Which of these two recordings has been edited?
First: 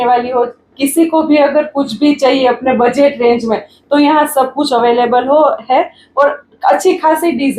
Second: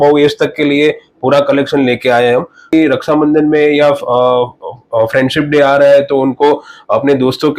second; 1 cut; at 2.7 s

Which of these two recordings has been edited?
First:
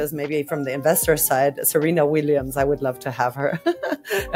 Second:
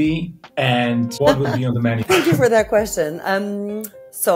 second; 2 cuts; at 1.1 s, 2.0 s

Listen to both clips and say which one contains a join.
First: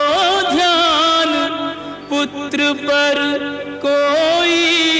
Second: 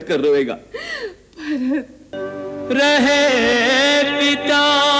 second; 1 cut; at 2.1 s

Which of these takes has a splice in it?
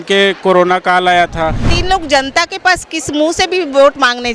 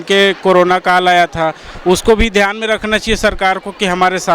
first; 1 cut; at 1.8 s

